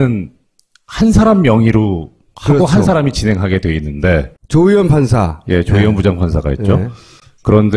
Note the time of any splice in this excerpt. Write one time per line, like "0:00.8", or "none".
0:05.4